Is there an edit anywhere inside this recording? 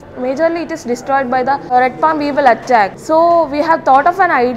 yes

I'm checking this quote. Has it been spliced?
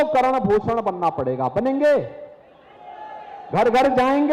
no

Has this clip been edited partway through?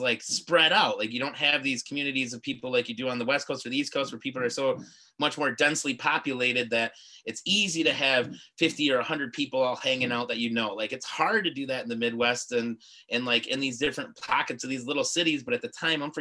no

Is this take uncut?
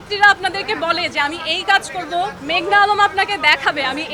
yes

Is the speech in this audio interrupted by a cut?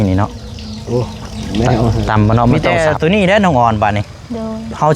yes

